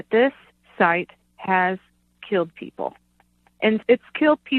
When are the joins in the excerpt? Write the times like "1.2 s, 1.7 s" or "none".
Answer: 3.7 s